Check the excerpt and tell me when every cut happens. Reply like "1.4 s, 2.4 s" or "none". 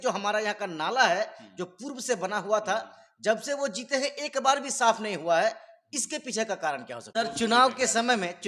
6.9 s